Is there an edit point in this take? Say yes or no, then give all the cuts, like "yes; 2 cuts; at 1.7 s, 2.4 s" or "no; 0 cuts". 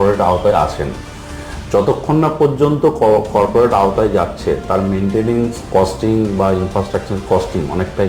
no; 0 cuts